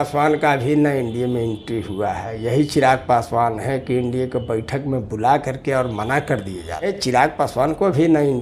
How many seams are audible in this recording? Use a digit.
1